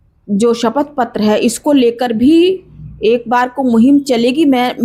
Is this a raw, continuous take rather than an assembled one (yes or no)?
yes